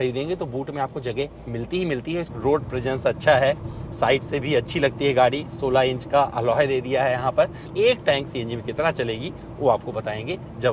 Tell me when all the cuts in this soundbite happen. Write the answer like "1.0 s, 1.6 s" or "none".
2.3 s, 7.6 s